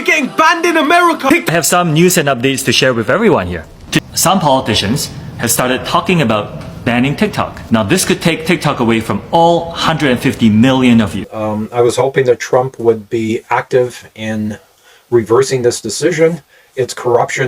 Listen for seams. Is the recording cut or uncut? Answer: cut